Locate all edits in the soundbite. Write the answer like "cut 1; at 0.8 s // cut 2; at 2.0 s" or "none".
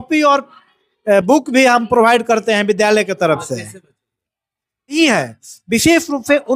cut 1; at 5.0 s